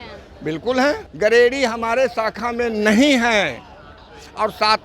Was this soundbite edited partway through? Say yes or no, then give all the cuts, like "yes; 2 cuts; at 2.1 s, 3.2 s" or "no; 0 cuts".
yes; 1 cut; at 1.1 s